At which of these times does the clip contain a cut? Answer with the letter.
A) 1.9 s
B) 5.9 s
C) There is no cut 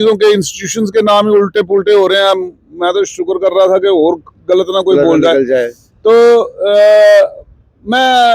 C